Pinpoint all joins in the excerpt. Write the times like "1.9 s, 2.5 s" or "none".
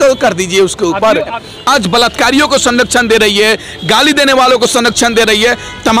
1.4 s